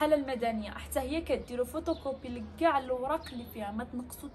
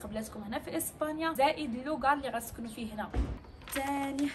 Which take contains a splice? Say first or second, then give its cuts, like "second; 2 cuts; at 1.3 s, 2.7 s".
second; 2 cuts; at 1.3 s, 3.4 s